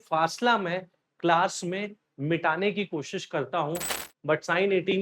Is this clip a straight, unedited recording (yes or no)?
no